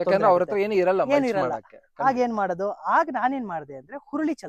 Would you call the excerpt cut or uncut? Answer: uncut